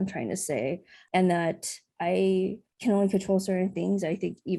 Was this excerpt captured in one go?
no; 3 cuts; at 0.9 s, 1.9 s, 2.7 s

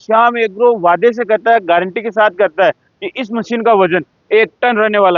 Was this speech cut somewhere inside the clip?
no; 0 cuts

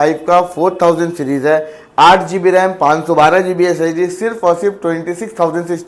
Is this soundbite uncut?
yes; 0 cuts

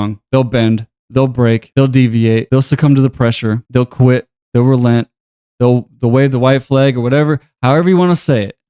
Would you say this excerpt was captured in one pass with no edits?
no; 3 cuts; at 1.7 s, 2.5 s, 3.6 s

